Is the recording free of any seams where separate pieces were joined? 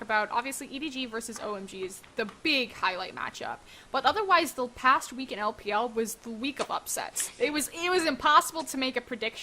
no; 1 cut; at 6.5 s

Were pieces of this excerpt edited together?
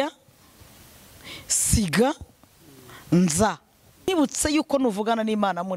yes; 1 cut; at 4.1 s

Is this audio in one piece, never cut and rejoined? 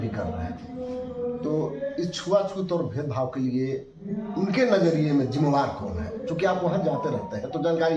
yes; 0 cuts

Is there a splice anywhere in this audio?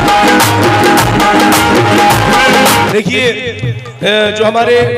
yes; 1 cut; at 2.9 s

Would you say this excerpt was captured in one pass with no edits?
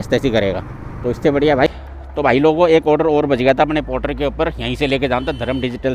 no; 1 cut; at 1.7 s

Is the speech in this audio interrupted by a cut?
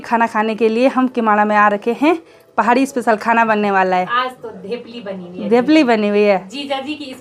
no; 0 cuts

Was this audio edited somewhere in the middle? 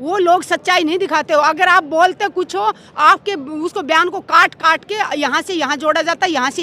no; 0 cuts

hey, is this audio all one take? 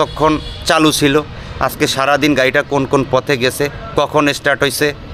yes; 0 cuts

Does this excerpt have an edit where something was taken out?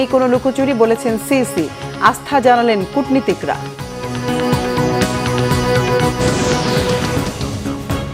yes; 1 cut; at 7.1 s

